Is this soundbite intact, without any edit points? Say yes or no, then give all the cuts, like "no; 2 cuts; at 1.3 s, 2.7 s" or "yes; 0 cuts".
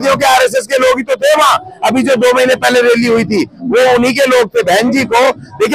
yes; 0 cuts